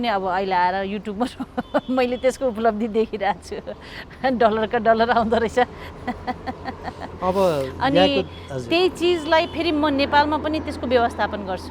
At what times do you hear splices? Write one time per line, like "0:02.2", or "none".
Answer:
none

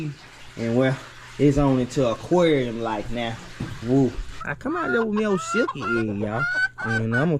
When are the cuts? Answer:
0:04.4

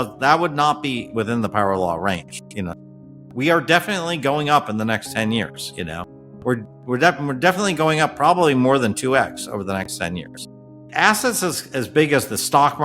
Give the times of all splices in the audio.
0:10.6

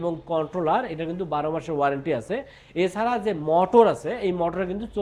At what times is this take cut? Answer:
none

